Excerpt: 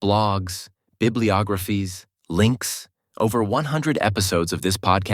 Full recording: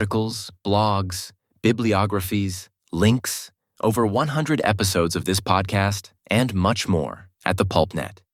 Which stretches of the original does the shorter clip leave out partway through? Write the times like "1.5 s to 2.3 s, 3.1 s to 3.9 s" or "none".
none